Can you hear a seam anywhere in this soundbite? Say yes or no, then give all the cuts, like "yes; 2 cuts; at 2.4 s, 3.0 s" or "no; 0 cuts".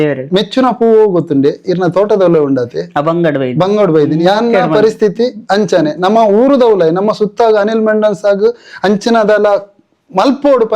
no; 0 cuts